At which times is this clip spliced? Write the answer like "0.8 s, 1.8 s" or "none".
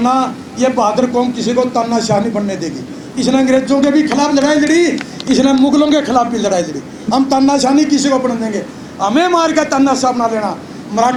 none